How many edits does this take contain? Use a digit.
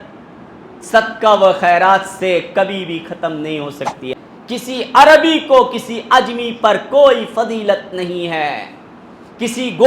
1